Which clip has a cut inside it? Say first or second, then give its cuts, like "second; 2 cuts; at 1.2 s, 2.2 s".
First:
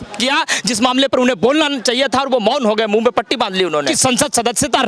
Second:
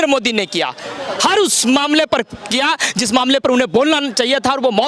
first; 1 cut; at 3.9 s